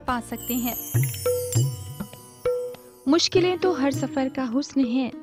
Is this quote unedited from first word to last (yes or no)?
no